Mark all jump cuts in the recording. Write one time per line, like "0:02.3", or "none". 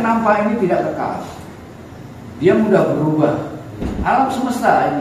0:03.9